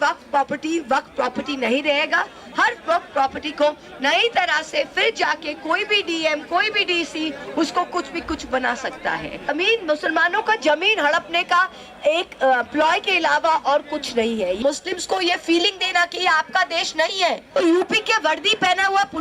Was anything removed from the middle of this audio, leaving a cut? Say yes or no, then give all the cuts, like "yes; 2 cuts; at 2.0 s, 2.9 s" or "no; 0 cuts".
yes; 3 cuts; at 9.5 s, 14.6 s, 17.6 s